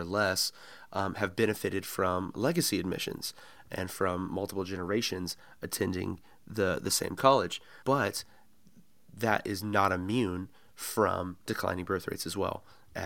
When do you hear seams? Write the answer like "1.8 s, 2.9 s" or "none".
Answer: 7.7 s